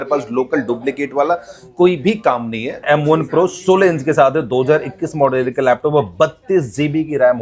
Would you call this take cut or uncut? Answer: cut